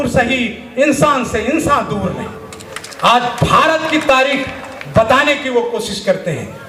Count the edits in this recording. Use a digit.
0